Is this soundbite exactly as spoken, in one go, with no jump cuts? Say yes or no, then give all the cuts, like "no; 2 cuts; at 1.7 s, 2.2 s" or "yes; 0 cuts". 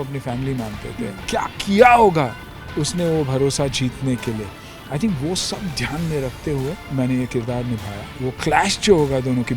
no; 3 cuts; at 1.1 s, 6.8 s, 8.2 s